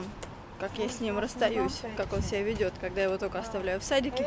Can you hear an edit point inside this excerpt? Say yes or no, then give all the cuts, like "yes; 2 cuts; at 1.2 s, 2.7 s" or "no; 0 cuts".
no; 0 cuts